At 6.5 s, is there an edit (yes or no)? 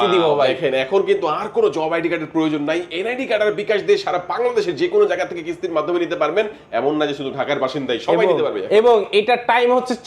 no